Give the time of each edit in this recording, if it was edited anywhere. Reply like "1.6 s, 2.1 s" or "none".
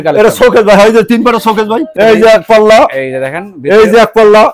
1.8 s